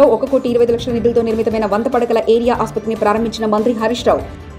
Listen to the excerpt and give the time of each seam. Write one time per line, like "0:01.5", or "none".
none